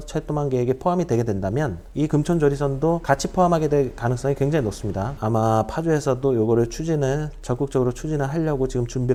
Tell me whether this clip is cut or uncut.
uncut